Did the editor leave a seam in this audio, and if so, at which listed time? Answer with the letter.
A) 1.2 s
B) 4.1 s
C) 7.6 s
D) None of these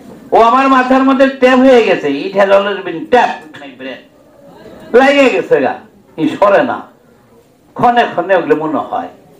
B